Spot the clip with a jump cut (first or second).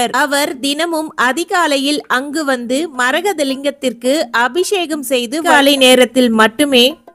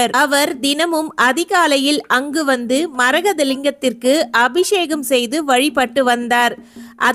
first